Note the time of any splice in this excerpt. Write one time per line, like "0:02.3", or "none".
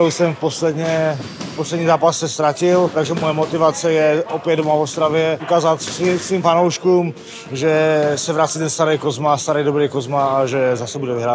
0:02.9
0:05.4